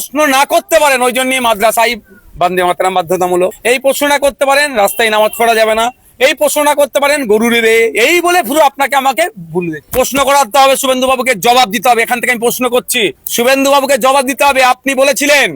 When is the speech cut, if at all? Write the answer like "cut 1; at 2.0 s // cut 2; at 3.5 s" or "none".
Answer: none